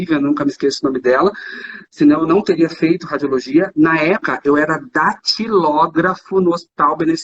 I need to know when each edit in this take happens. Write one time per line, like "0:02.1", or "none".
0:04.2